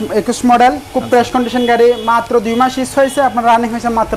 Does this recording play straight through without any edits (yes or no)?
yes